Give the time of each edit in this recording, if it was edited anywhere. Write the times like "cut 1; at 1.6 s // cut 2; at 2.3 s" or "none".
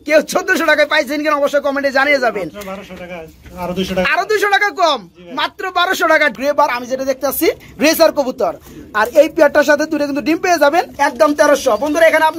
cut 1; at 6.3 s // cut 2; at 10.9 s